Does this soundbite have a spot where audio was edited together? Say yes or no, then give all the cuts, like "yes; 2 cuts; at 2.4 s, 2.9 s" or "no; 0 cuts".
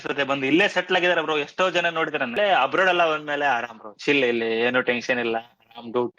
yes; 1 cut; at 2.3 s